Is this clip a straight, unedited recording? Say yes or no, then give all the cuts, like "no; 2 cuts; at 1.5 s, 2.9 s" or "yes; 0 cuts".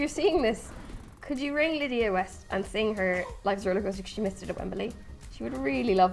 yes; 0 cuts